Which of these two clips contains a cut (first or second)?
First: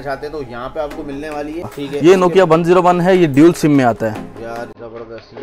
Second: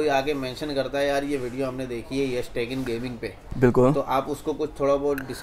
first